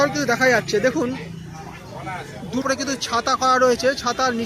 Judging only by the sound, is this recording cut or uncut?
cut